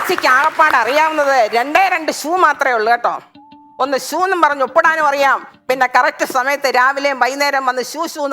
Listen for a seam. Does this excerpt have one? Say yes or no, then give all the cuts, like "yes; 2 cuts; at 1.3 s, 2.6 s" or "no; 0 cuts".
no; 0 cuts